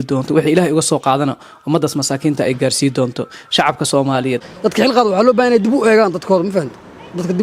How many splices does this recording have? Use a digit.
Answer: 1